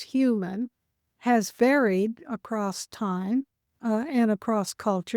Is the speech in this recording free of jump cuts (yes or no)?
no